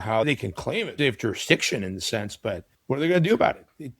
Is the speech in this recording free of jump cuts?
no; 1 cut; at 2.7 s

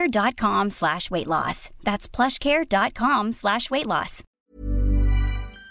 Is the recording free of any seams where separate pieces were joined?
no; 1 cut; at 4.3 s

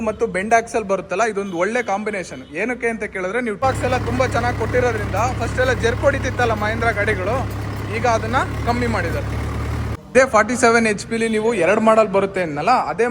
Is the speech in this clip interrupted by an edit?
yes; 2 cuts; at 3.6 s, 9.9 s

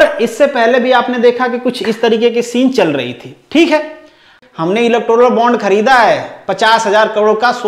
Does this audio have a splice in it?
yes; 1 cut; at 4.4 s

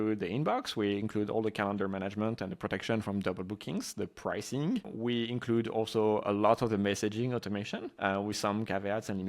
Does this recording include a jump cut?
yes; 1 cut; at 7.8 s

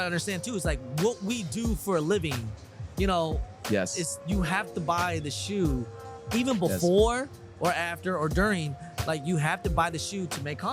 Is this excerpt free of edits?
yes; 0 cuts

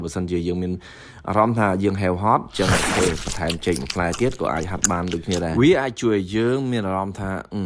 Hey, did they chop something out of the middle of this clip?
no; 0 cuts

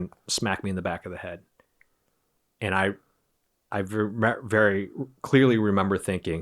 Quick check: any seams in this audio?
no; 0 cuts

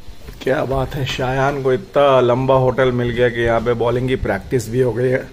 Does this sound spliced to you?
no; 0 cuts

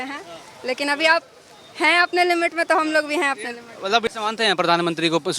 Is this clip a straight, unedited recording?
no; 1 cut; at 4.1 s

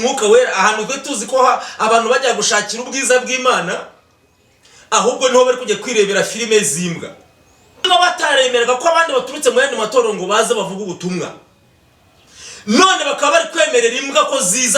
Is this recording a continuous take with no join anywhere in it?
no; 1 cut; at 7.8 s

